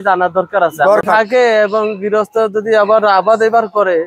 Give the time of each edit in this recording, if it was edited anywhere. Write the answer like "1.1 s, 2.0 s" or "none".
1.0 s